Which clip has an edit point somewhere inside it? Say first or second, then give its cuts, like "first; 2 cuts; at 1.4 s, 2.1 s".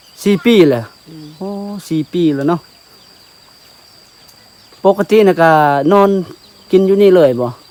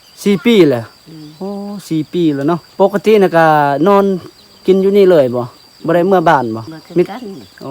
second; 2 cuts; at 2.7 s, 6.7 s